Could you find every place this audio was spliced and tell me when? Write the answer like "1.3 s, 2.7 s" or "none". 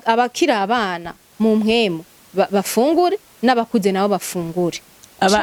none